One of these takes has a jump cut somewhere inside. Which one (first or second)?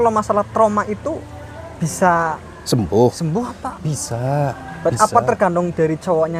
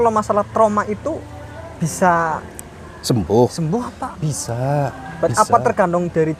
first